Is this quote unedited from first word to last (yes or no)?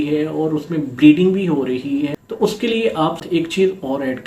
no